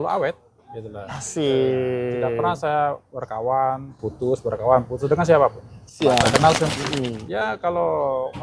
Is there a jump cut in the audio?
yes; 1 cut; at 6.8 s

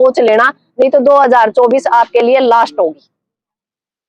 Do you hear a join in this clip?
no; 0 cuts

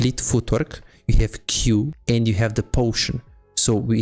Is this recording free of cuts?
no; 1 cut; at 2.0 s

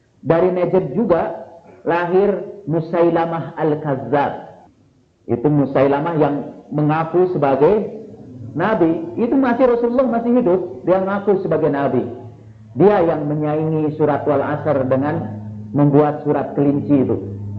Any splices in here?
no; 0 cuts

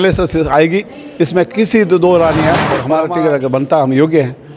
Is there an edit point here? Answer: yes; 1 cut; at 2.8 s

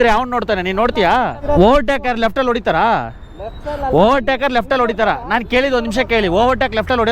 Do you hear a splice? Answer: yes; 1 cut; at 1.4 s

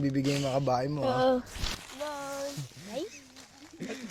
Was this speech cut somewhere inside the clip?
no; 0 cuts

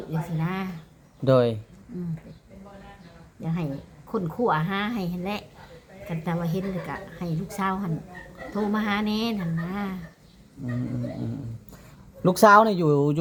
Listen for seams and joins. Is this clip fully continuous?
yes; 0 cuts

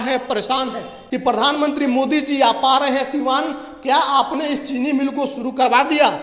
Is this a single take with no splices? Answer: no; 1 cut; at 0.9 s

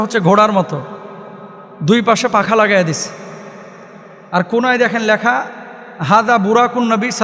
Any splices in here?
no; 0 cuts

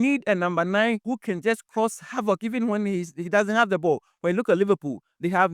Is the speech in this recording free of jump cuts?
no; 1 cut; at 1.0 s

